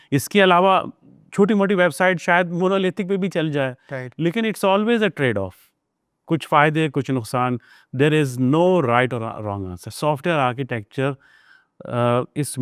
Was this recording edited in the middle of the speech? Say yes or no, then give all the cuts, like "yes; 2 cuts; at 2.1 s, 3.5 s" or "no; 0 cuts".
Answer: no; 0 cuts